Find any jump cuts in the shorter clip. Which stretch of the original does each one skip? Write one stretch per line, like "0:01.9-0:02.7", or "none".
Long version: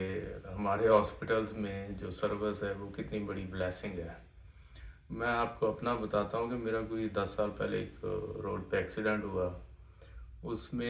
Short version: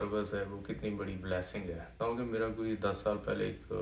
0:04.3-0:06.3